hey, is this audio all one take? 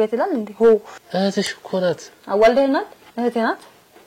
no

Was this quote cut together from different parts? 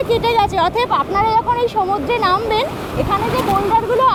no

